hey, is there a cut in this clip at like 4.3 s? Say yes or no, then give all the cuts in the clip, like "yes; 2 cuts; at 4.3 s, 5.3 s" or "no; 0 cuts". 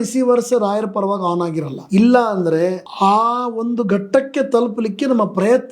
no; 2 cuts; at 1.8 s, 2.9 s